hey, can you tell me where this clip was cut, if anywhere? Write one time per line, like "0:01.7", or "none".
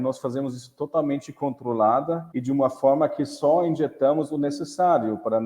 0:02.3

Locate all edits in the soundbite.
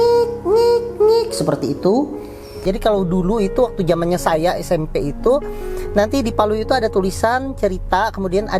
0:02.6

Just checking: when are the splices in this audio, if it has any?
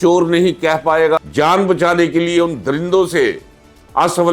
0:01.2

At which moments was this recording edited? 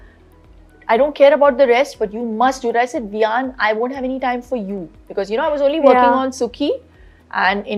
none

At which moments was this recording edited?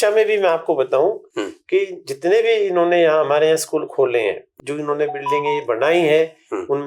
0:04.5

